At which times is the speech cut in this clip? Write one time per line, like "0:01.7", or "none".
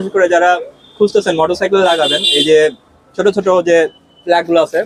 none